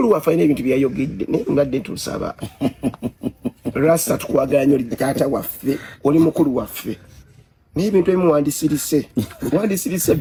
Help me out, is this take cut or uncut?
uncut